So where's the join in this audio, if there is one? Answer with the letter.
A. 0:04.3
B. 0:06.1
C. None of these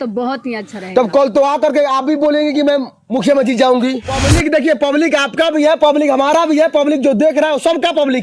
A